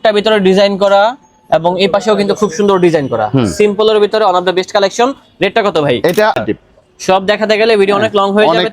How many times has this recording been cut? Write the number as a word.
one